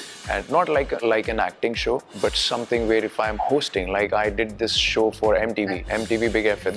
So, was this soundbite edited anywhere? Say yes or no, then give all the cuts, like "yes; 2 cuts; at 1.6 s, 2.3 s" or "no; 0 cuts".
yes; 3 cuts; at 1.0 s, 2.1 s, 5.8 s